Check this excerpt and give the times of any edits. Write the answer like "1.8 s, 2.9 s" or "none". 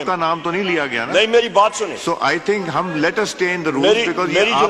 none